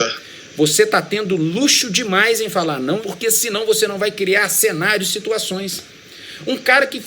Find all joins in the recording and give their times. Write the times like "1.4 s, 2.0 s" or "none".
3.0 s